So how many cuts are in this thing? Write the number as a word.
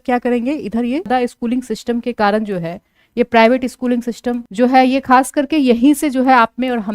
one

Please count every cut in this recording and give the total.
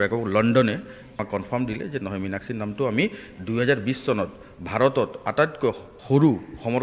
two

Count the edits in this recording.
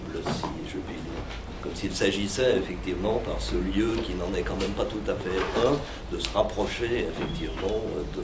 one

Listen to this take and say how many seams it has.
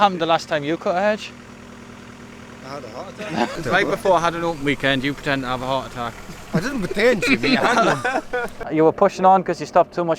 two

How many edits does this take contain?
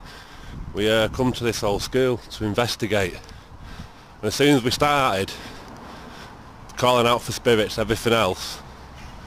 one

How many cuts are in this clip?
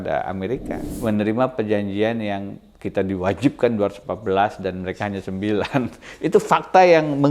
one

